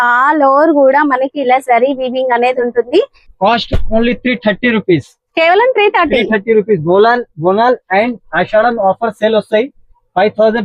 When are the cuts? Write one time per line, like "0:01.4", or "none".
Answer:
0:03.2